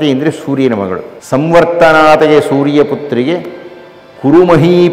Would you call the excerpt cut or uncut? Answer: cut